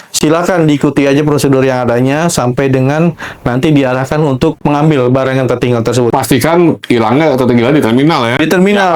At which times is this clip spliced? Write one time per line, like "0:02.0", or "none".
0:04.6
0:06.1

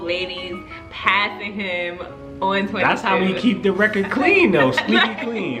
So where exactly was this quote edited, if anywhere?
none

